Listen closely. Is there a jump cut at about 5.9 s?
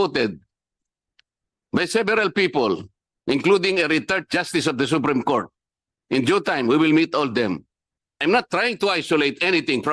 no; 1 cut; at 8.2 s

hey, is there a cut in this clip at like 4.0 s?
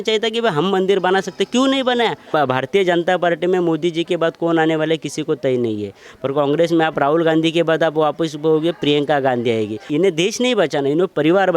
no; 2 cuts; at 2.3 s, 9.9 s

